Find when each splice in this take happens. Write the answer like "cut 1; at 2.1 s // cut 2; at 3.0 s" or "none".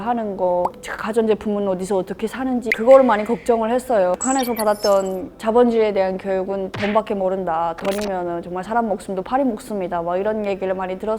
cut 1; at 2.7 s // cut 2; at 4.1 s